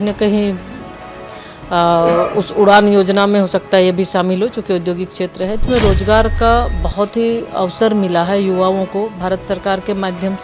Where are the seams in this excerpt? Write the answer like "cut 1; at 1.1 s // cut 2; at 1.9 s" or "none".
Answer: cut 1; at 5.6 s